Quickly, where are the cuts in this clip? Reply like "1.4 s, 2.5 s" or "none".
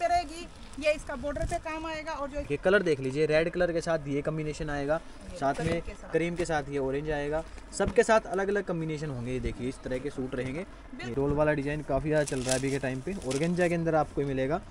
2.5 s, 11.1 s